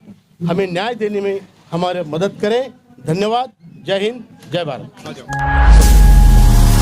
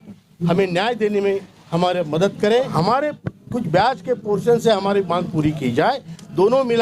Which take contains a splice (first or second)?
second